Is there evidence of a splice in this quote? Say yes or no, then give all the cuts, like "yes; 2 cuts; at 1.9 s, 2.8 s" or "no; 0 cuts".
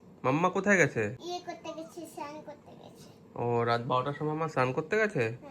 yes; 1 cut; at 1.2 s